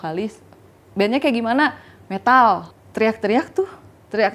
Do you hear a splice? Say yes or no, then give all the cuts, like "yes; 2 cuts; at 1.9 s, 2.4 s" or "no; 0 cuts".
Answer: yes; 1 cut; at 2.8 s